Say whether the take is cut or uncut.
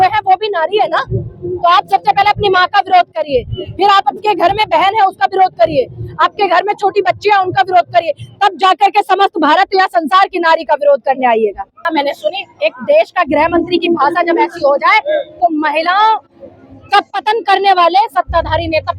cut